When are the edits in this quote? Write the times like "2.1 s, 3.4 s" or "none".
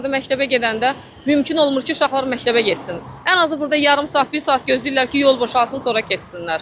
none